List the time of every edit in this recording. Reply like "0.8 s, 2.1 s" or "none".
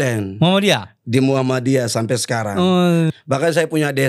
3.1 s